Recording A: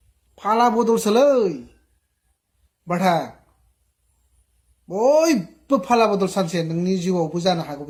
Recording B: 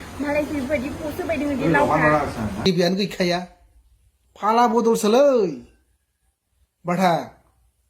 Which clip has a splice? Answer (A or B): B